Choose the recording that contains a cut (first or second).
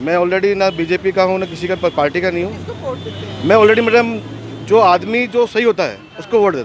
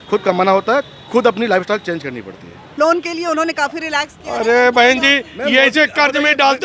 second